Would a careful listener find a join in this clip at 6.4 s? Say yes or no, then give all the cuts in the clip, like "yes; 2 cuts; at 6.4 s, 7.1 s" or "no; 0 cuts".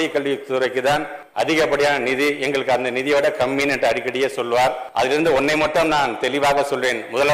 no; 2 cuts; at 1.2 s, 4.8 s